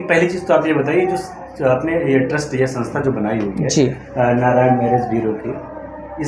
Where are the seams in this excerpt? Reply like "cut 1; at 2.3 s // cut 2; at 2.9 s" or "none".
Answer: none